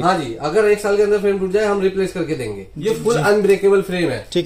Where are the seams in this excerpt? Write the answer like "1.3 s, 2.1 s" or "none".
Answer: 2.7 s